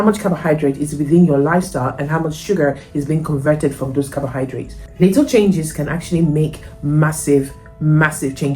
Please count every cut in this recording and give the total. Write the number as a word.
zero